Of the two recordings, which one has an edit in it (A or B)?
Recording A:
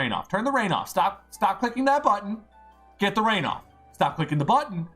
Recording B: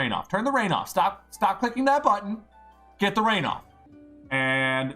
B